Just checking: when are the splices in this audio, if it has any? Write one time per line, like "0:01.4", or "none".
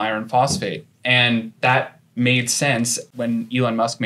0:03.0